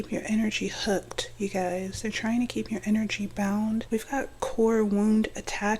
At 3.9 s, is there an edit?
yes; 1 cut; at 3.9 s

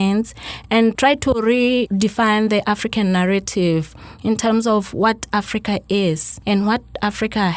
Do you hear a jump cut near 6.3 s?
yes; 3 cuts; at 1.0 s, 1.9 s, 6.3 s

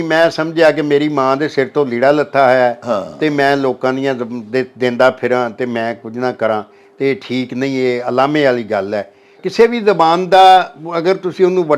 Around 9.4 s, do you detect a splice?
yes; 1 cut; at 9.4 s

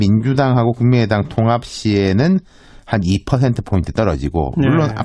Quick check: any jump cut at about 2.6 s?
yes; 1 cut; at 2.6 s

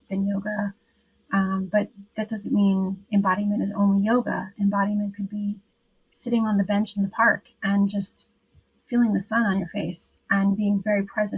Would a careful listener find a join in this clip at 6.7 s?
no; 0 cuts

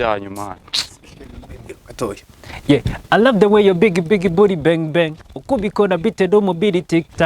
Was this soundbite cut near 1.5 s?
yes; 1 cut; at 1.5 s

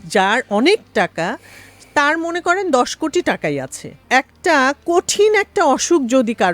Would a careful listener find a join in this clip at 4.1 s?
yes; 1 cut; at 4.1 s

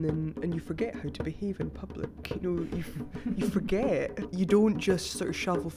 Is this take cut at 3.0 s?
no; 1 cut; at 4.3 s

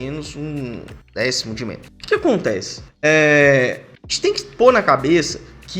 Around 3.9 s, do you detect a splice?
yes; 1 cut; at 3.9 s

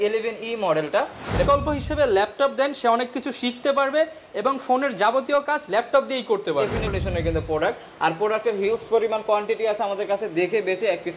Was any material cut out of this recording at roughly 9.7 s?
no; 2 cuts; at 1.5 s, 6.9 s

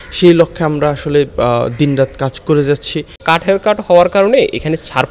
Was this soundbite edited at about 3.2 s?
yes; 1 cut; at 3.2 s

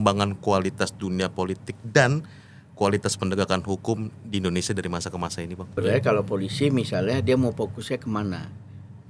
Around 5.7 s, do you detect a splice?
yes; 1 cut; at 5.7 s

